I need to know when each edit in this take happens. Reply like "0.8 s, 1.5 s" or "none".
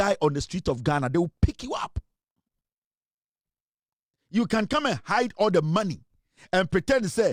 none